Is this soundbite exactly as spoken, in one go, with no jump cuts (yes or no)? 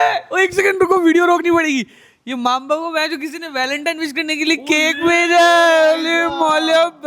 yes